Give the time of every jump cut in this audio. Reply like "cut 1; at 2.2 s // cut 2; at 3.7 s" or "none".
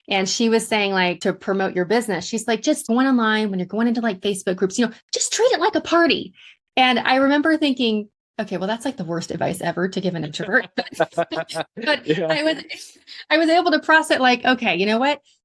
cut 1; at 1.2 s // cut 2; at 2.9 s // cut 3; at 8.2 s